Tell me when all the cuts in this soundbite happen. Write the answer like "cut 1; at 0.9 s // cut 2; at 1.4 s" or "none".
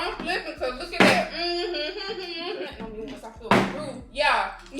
cut 1; at 2.7 s